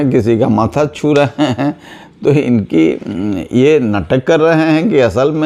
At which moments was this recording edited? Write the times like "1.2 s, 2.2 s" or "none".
none